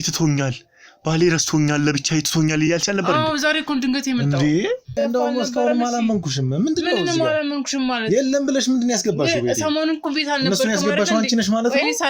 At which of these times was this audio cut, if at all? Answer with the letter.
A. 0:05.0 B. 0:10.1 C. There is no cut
A